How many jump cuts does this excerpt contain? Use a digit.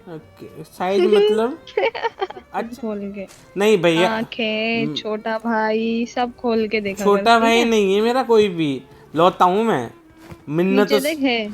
1